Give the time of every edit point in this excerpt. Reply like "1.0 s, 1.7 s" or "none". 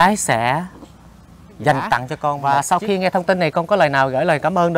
2.4 s